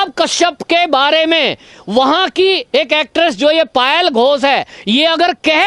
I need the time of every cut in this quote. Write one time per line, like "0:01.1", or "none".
none